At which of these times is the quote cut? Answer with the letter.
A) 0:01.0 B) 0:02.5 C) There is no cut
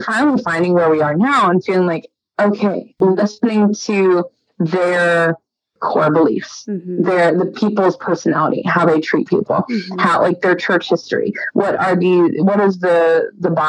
B